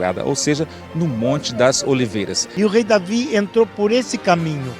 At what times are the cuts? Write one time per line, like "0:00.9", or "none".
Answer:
0:02.4